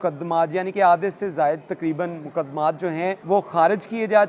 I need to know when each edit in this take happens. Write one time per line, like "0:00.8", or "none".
0:03.2